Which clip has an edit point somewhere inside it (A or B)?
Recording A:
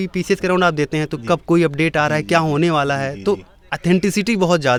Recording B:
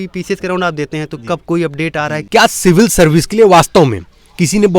B